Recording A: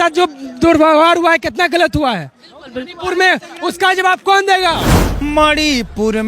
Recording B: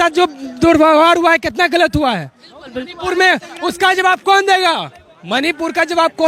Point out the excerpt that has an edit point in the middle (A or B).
A